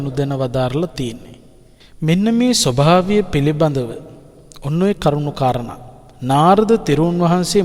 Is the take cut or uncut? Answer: uncut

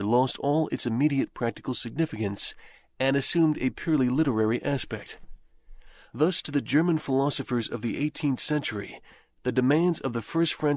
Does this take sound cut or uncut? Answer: cut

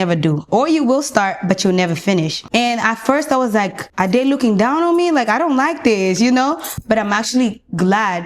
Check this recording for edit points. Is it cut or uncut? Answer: cut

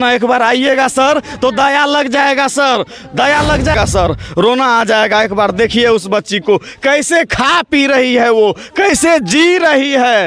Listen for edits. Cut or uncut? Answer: cut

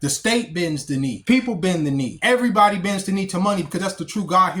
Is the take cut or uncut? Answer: cut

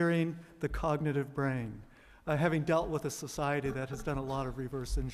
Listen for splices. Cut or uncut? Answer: uncut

